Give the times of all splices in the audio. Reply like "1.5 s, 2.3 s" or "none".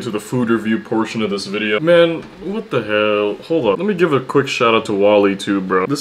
none